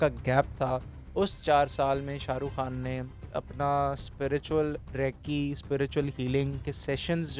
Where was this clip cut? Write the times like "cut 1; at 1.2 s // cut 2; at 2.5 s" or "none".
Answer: cut 1; at 3.2 s